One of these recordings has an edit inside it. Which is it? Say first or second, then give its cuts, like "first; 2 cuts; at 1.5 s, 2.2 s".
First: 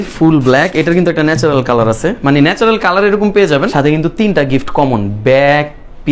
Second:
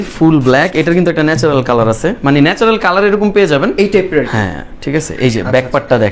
first; 1 cut; at 3.7 s